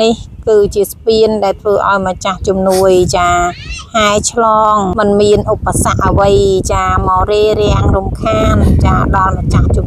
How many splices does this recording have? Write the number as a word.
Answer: one